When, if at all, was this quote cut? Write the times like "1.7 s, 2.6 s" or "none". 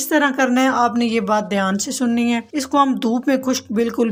none